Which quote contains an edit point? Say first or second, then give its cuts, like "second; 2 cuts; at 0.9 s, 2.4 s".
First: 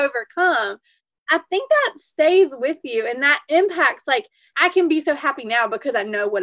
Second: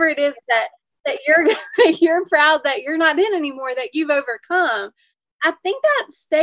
first; 1 cut; at 4.5 s